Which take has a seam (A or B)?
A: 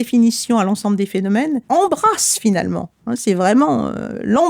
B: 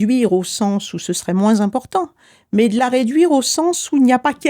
A